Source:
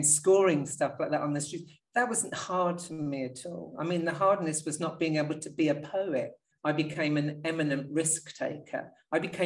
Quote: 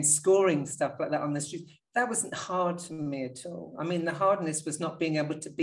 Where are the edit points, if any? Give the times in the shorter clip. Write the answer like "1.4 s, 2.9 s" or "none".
none

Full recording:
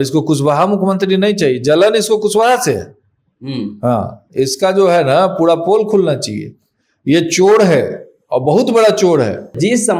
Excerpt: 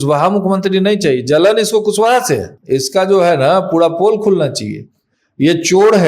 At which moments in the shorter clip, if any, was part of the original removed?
2.5 s

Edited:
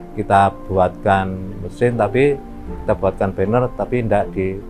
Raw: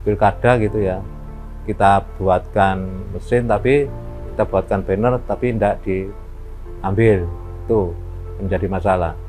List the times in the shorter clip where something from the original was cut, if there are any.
none

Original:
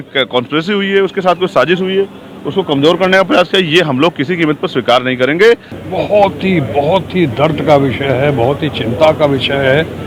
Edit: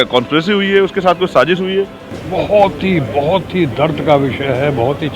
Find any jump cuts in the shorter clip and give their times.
2.1 s

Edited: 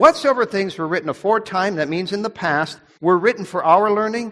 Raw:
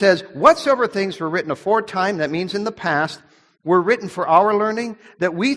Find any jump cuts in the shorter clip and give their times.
2.8 s

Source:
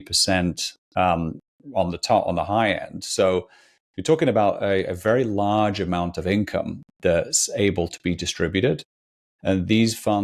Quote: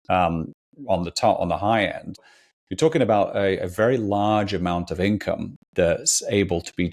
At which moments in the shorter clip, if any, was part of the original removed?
2.2 s

